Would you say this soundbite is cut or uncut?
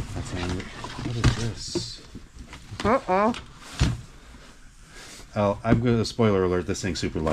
uncut